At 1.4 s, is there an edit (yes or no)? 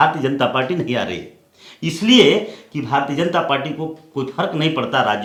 no